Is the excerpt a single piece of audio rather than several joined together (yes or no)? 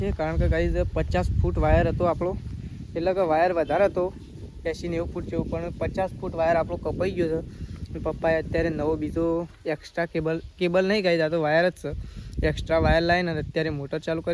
yes